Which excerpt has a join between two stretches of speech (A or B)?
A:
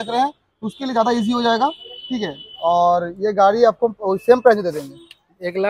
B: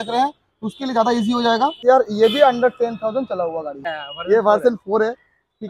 B